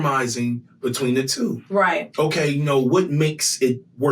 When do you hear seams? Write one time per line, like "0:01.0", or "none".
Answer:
none

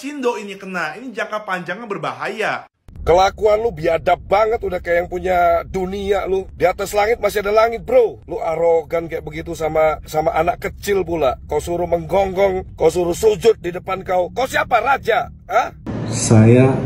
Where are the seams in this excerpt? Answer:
0:02.8
0:15.9

